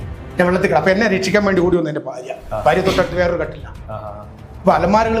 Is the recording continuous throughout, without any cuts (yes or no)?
yes